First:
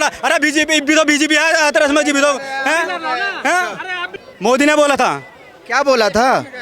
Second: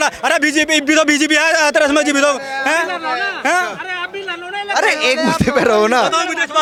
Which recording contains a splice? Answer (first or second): first